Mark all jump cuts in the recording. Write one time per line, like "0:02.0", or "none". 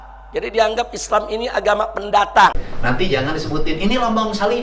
0:02.7